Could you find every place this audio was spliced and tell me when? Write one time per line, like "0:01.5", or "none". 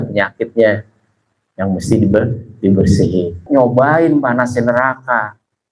0:03.4